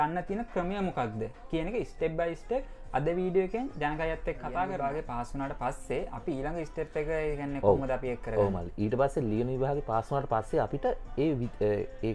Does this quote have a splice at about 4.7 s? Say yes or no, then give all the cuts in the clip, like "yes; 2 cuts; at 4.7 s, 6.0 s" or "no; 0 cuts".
yes; 1 cut; at 4.7 s